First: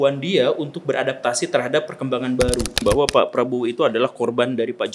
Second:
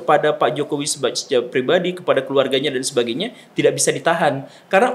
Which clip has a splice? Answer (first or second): first